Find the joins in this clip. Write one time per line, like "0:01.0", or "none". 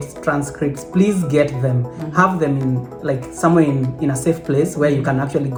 none